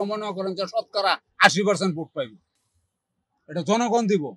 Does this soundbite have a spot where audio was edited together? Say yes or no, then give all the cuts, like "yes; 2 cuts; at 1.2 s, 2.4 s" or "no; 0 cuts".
no; 0 cuts